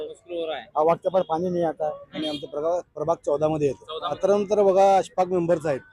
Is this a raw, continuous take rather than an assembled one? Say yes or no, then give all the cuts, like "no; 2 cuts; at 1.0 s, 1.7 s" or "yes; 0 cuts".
no; 2 cuts; at 2.1 s, 4.2 s